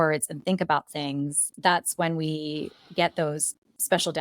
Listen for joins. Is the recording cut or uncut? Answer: cut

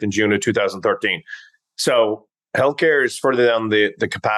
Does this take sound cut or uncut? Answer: uncut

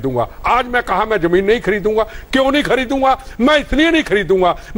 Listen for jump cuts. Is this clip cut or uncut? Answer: uncut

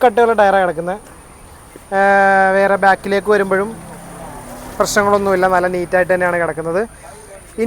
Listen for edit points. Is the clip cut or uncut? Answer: uncut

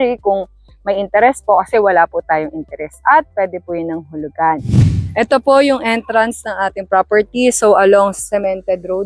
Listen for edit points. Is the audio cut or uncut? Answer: cut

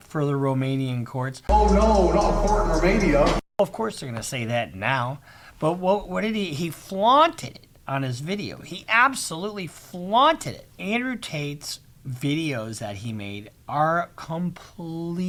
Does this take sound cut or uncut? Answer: uncut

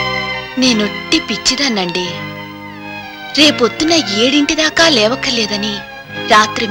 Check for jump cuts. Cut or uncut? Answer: uncut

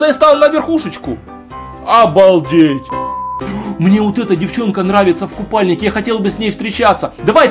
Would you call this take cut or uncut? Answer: cut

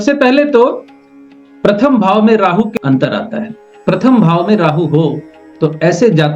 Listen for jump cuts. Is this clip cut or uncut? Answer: cut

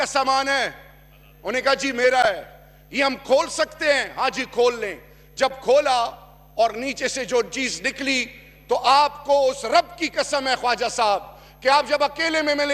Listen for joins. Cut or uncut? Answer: uncut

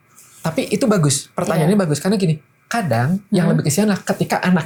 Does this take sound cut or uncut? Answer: uncut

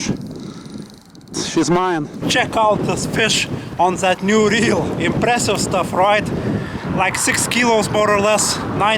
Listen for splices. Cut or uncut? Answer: cut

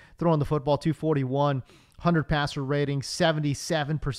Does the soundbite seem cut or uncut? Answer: uncut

